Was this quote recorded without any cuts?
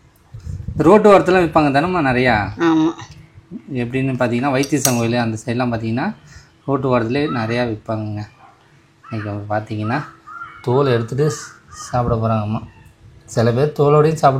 yes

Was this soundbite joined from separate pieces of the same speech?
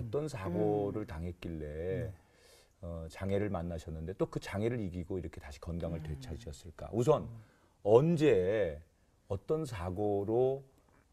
no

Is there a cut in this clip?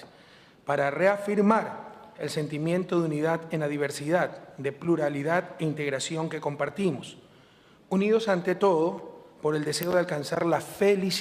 no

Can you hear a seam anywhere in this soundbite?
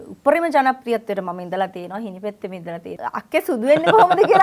yes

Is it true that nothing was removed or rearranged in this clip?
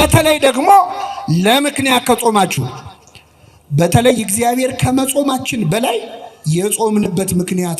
yes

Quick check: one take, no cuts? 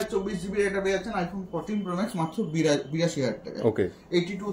yes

